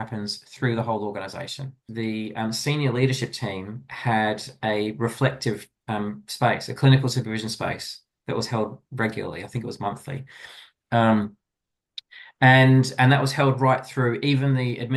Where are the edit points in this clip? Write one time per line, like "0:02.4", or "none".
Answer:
0:01.8